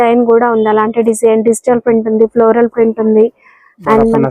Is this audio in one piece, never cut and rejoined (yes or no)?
yes